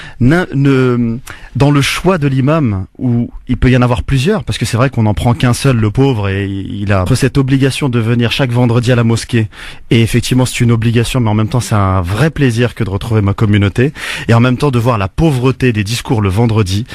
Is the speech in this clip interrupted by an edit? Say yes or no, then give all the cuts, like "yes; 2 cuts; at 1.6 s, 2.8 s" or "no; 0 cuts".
no; 0 cuts